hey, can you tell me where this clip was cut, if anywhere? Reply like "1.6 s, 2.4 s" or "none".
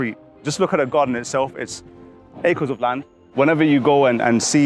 3.3 s